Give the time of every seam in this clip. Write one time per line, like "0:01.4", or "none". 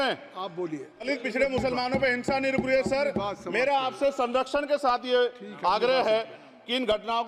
0:01.1